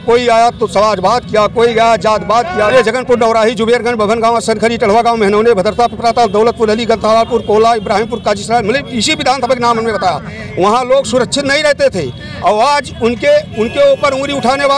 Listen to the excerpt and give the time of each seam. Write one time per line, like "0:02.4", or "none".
0:02.7